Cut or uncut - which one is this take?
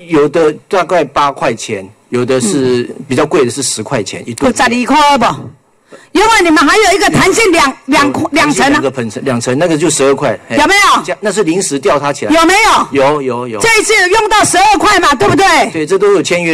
uncut